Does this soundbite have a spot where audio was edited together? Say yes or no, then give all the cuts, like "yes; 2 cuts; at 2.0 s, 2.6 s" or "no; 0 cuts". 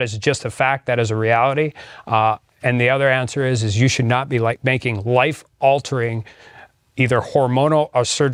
no; 0 cuts